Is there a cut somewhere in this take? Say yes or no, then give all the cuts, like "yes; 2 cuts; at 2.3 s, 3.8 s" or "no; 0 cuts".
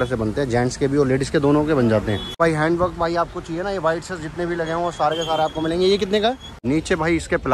yes; 2 cuts; at 2.4 s, 6.5 s